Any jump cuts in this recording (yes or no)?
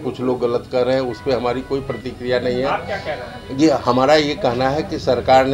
no